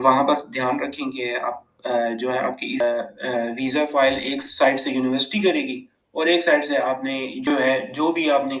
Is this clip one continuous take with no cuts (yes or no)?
no